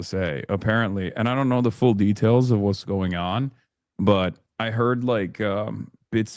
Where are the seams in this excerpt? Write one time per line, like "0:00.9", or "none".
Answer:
0:04.5